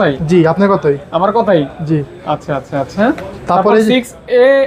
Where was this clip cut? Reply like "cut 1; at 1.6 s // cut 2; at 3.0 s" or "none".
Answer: none